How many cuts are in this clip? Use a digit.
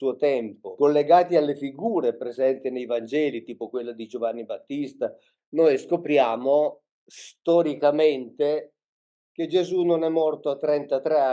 1